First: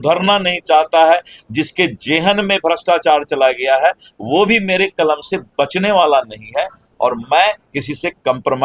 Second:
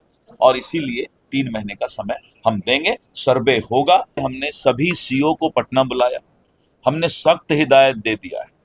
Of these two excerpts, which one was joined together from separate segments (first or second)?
second